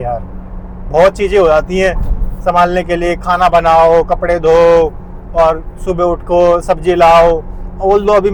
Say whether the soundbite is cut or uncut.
uncut